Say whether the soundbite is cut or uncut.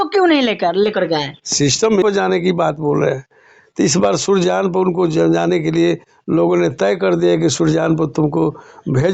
cut